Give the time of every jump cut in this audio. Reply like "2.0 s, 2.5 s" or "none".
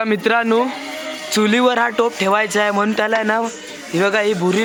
none